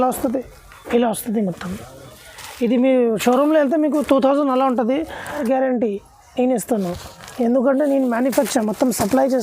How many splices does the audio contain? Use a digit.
1